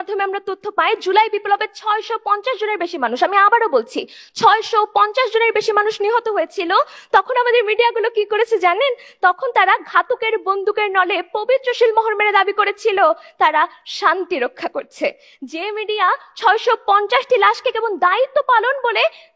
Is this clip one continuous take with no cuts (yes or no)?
yes